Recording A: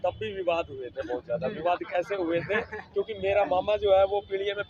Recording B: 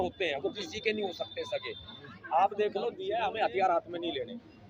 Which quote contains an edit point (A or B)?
B